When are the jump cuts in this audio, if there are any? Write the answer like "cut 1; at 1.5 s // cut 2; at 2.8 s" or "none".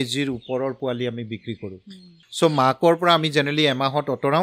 cut 1; at 2.2 s

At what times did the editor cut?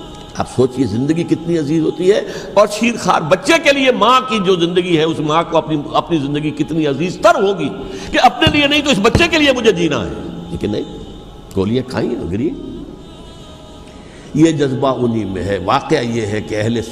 none

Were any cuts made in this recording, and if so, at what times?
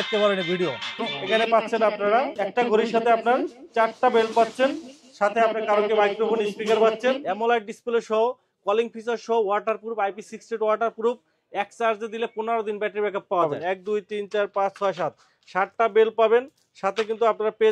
cut 1; at 1.1 s // cut 2; at 7.2 s // cut 3; at 13.4 s

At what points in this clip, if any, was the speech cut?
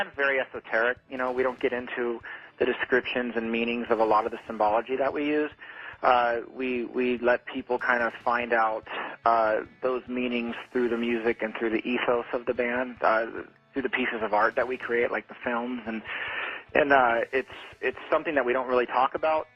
cut 1; at 7.9 s

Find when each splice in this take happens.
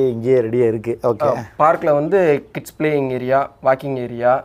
none

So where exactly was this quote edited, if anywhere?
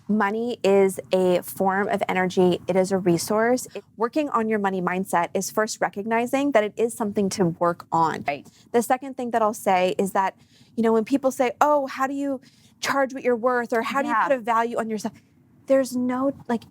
cut 1; at 3.7 s // cut 2; at 8.3 s

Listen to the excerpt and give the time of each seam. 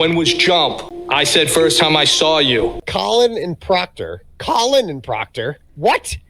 cut 1; at 0.9 s // cut 2; at 2.9 s

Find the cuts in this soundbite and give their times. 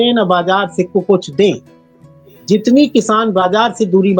none

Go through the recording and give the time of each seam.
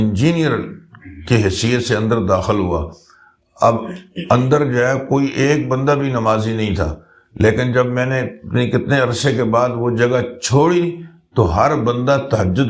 none

